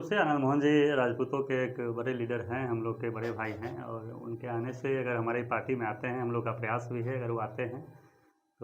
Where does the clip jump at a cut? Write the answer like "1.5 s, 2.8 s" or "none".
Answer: none